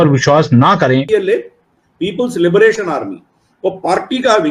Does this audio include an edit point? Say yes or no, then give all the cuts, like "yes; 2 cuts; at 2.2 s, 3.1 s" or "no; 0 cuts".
yes; 1 cut; at 1.1 s